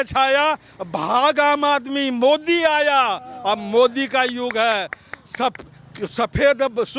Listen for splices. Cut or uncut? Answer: uncut